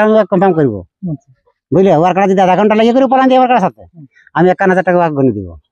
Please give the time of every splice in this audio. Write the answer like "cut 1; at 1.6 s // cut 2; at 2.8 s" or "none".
none